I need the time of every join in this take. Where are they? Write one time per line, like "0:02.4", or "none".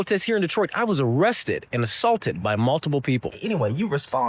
0:03.4